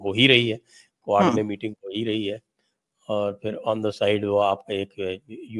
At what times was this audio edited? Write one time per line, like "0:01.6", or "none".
none